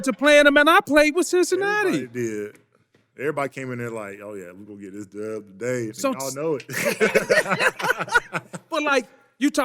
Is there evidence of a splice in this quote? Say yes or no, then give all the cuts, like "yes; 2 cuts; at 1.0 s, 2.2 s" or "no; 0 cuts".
no; 0 cuts